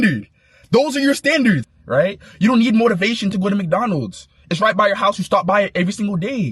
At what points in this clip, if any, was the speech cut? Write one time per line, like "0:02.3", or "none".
0:01.7